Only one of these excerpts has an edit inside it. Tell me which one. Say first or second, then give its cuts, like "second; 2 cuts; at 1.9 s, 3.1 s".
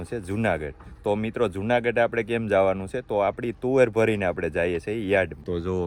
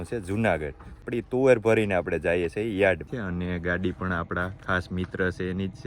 second; 2 cuts; at 1.0 s, 3.1 s